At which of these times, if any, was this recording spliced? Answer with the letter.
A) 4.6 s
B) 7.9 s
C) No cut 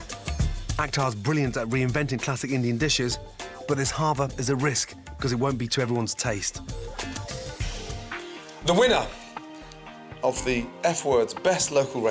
B